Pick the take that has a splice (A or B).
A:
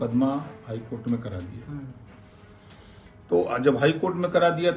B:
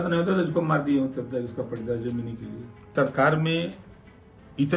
B